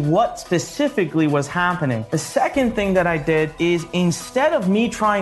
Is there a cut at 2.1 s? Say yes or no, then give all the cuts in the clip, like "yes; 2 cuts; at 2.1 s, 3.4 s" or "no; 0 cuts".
yes; 2 cuts; at 2.1 s, 3.5 s